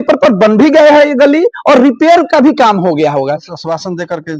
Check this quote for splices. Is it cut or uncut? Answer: cut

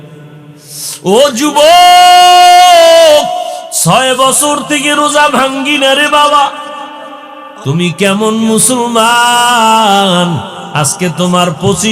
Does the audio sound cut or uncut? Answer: cut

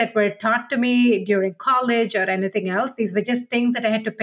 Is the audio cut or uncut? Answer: uncut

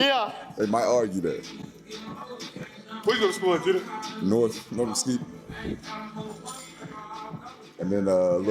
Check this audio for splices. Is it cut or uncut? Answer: uncut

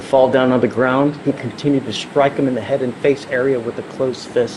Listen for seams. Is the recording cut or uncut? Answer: uncut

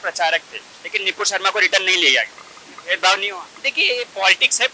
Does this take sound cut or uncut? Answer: uncut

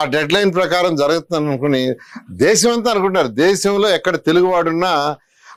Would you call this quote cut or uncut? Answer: uncut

